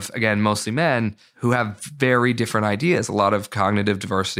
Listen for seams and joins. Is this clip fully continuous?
no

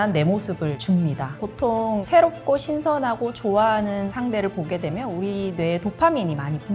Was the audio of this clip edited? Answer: yes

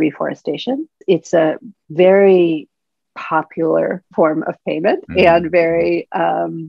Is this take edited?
yes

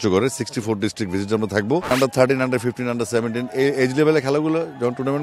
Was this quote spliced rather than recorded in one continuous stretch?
yes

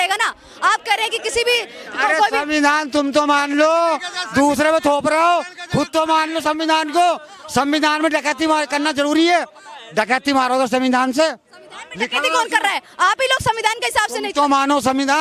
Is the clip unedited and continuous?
yes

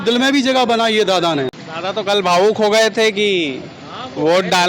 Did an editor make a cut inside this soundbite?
yes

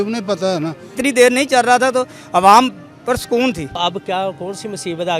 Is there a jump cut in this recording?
yes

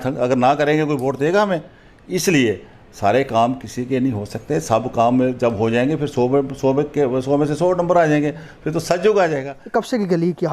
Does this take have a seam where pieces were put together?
yes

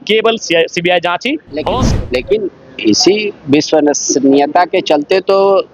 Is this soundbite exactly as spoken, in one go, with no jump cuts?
no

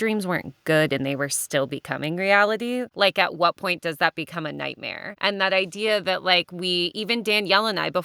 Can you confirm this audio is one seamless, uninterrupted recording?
no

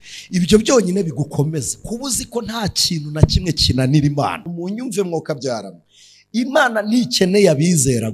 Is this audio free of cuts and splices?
no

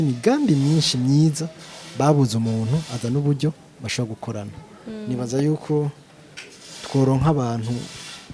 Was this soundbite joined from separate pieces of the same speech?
no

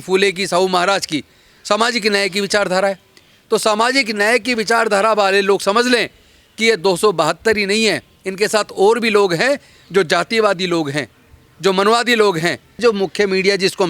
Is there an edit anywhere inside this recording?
yes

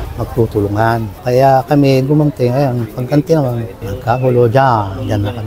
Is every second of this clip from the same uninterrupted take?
yes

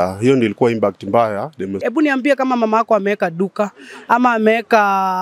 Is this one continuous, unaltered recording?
no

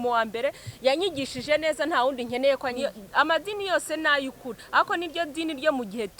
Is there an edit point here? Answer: yes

